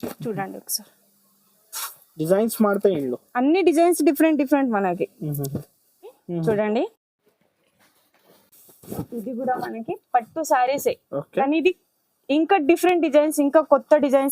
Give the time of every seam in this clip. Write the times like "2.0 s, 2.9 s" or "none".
6.2 s